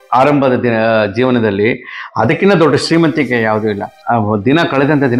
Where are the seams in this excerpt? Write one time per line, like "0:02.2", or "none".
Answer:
none